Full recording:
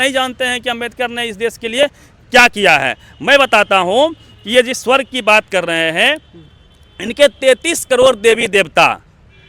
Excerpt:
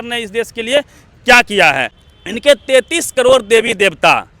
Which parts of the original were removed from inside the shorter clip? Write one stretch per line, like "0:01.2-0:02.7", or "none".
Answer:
0:03.1-0:06.7

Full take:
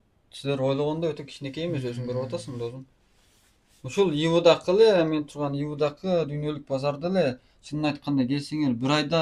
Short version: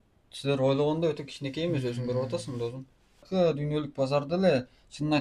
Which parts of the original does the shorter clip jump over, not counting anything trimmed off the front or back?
0:03.3-0:06.0

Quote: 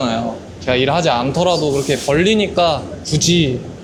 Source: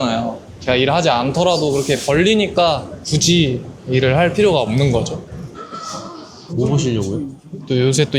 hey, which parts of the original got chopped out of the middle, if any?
none

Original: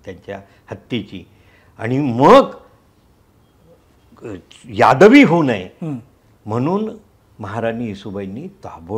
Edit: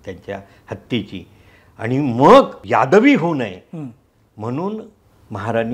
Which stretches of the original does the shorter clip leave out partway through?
0:02.6-0:04.7

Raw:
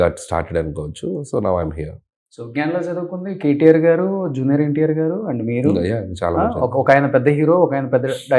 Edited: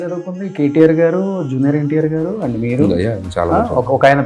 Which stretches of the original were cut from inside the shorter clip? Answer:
none

